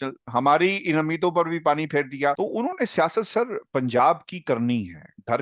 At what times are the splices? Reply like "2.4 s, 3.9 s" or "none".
2.4 s

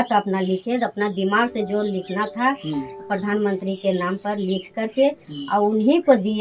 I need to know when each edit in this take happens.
none

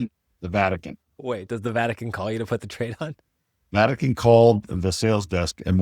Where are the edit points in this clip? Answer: 1.1 s

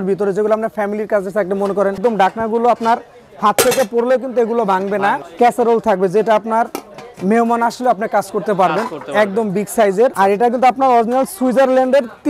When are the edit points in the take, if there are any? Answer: 2.0 s, 5.3 s, 10.1 s

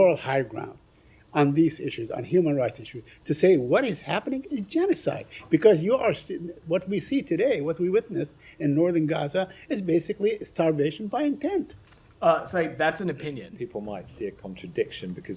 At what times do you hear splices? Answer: 13.5 s

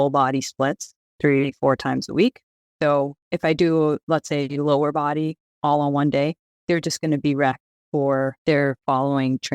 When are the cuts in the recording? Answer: 8.4 s

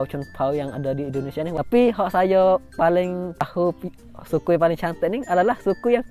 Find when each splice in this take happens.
1.5 s, 3.4 s

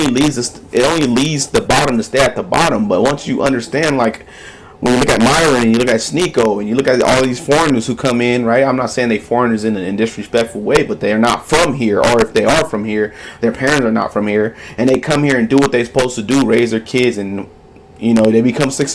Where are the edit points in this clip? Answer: none

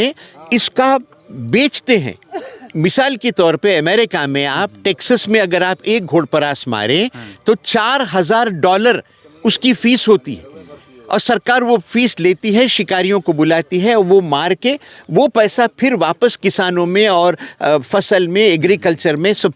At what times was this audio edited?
none

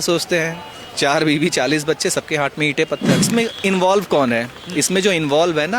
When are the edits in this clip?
3.3 s

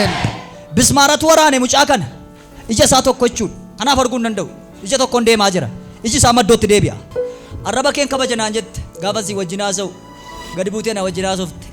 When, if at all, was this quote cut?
7.0 s

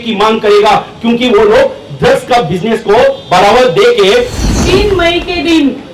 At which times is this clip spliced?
4.4 s

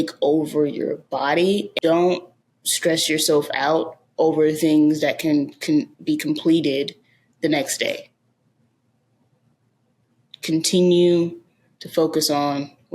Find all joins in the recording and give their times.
1.7 s

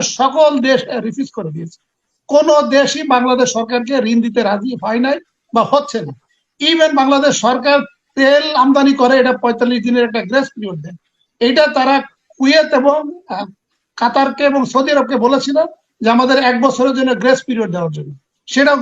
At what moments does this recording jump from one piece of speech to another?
none

